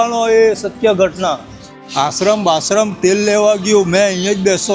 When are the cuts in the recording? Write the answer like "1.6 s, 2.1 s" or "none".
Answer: 1.6 s